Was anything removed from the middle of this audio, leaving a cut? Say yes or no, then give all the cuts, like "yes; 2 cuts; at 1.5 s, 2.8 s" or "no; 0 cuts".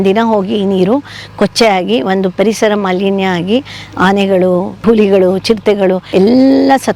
no; 0 cuts